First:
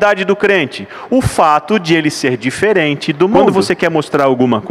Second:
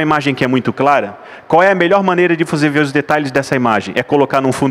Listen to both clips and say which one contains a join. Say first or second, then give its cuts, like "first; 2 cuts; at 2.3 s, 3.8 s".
first; 1 cut; at 3.5 s